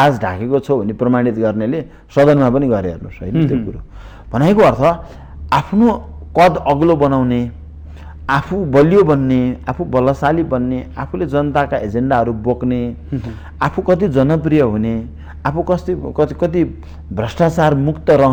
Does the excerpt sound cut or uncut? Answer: uncut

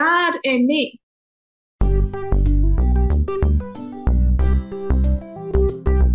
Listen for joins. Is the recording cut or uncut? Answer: cut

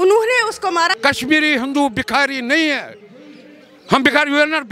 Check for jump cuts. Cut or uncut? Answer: uncut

